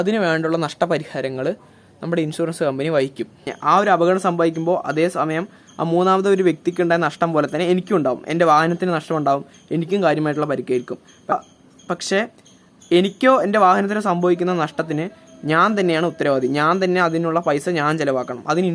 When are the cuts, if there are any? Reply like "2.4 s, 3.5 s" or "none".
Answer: 3.5 s